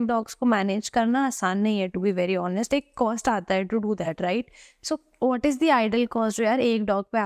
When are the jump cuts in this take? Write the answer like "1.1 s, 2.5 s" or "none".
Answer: none